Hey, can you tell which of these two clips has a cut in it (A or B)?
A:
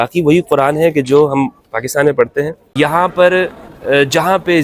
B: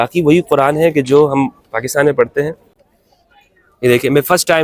A